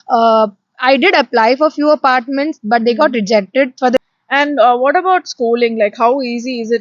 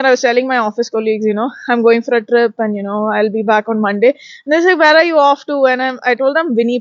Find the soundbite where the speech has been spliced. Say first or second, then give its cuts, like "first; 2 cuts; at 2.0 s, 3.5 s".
first; 1 cut; at 4.0 s